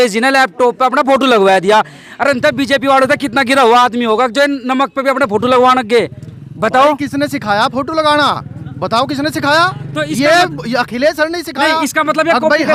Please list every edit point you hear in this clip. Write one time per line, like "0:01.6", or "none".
none